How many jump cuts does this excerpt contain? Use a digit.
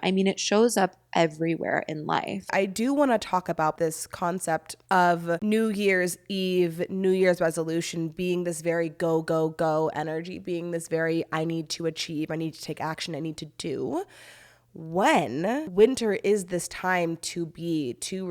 5